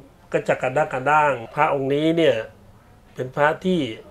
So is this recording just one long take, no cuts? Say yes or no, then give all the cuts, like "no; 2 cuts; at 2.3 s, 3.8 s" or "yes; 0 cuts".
no; 1 cut; at 1.5 s